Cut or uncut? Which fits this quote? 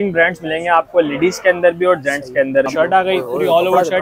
cut